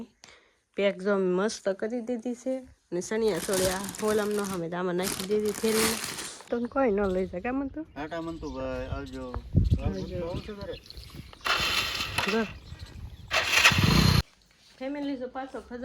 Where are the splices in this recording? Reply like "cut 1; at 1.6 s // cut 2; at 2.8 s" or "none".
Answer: cut 1; at 6.5 s // cut 2; at 14.2 s